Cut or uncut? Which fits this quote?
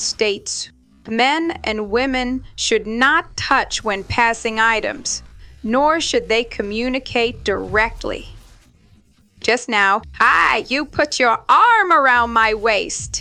uncut